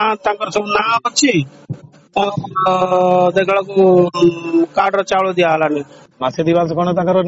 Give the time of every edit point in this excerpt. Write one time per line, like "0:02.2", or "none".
0:06.0